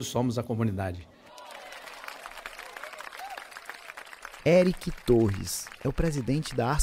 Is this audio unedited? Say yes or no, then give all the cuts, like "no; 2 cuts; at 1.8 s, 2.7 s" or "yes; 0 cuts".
yes; 0 cuts